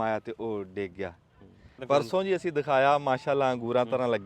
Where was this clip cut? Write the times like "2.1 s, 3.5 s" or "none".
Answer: 1.8 s

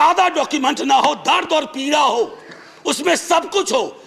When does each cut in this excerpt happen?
none

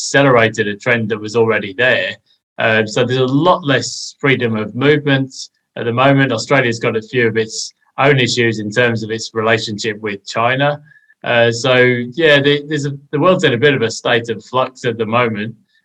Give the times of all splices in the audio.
none

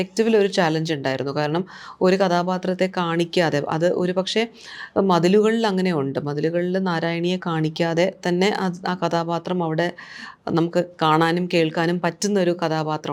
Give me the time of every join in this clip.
none

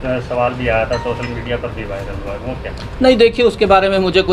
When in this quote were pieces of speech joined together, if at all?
none

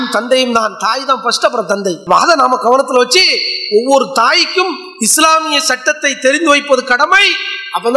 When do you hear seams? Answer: none

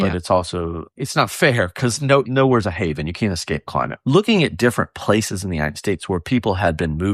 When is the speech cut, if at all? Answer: 0.8 s, 2.3 s, 3.9 s

